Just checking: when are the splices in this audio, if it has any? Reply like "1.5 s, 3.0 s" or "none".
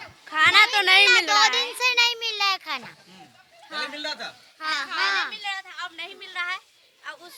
none